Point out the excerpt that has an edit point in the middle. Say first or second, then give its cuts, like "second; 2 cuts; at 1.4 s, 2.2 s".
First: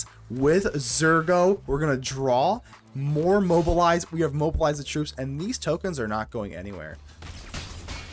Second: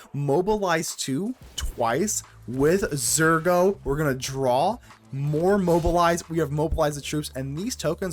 first; 1 cut; at 7.1 s